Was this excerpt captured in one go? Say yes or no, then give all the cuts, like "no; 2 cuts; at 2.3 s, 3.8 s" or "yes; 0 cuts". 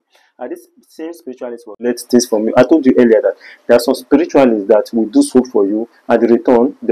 no; 1 cut; at 2.0 s